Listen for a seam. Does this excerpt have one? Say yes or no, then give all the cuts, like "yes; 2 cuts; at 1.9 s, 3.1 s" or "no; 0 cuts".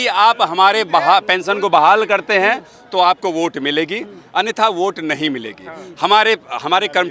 no; 0 cuts